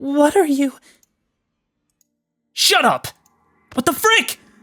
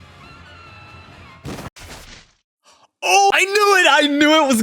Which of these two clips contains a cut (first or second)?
second